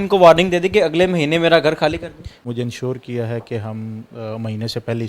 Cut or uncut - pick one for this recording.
cut